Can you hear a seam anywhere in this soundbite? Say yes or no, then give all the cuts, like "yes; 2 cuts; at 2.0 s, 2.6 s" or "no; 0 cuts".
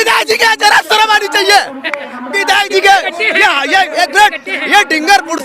no; 0 cuts